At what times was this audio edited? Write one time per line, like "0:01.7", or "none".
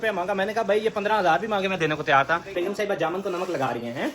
0:02.5